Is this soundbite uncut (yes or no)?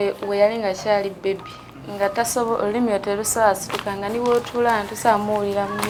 yes